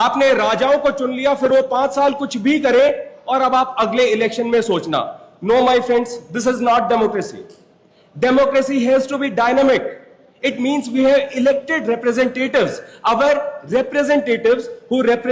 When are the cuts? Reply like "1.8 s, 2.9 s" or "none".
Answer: none

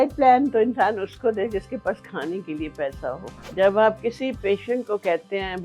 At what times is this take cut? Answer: 3.3 s

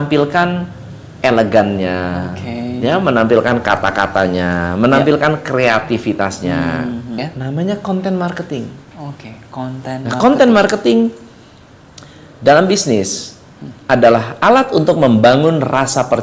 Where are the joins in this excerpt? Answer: 7.1 s

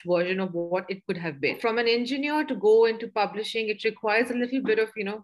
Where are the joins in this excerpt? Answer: 1.6 s

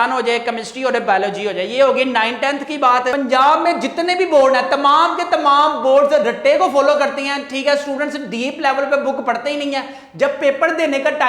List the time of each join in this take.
3.2 s

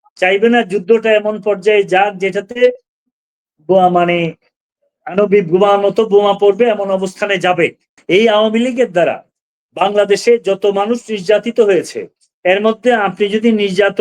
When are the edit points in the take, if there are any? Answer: 7.9 s

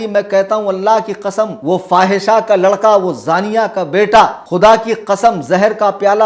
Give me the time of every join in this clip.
1.6 s, 4.4 s

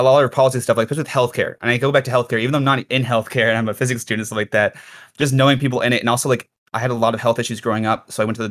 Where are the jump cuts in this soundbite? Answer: 6.6 s

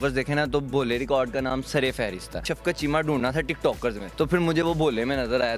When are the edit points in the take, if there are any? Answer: 2.5 s, 4.0 s

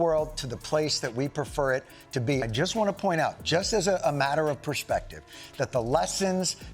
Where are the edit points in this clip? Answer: 2.5 s

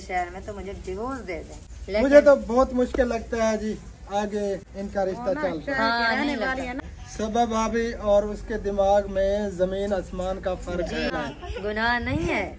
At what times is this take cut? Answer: 1.8 s, 6.8 s, 11.1 s

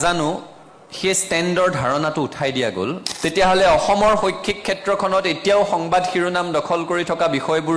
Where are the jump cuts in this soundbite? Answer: 3.1 s

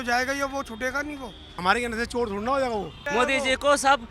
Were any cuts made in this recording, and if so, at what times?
1.5 s, 3.0 s

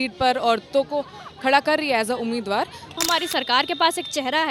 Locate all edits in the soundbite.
3.0 s

